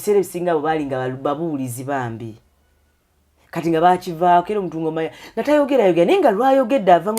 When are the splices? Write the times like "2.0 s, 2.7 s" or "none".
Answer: none